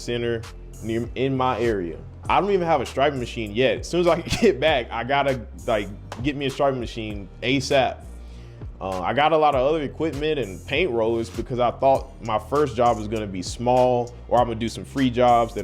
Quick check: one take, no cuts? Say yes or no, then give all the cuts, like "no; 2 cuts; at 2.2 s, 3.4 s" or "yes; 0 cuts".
no; 1 cut; at 2.2 s